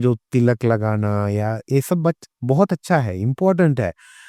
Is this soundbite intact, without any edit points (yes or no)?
yes